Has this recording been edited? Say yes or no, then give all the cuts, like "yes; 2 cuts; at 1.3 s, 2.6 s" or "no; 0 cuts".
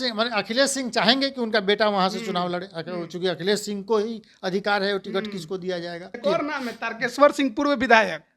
yes; 1 cut; at 6.0 s